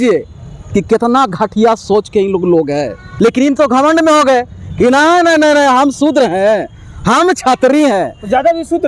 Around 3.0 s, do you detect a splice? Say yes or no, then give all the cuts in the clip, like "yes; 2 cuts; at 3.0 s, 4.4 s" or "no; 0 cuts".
yes; 1 cut; at 3.0 s